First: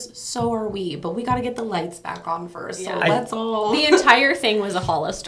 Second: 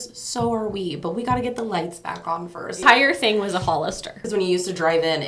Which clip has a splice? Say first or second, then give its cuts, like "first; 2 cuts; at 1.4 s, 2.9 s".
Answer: second; 2 cuts; at 2.8 s, 4.2 s